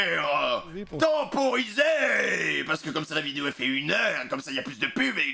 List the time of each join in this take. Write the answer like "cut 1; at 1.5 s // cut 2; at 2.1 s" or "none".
none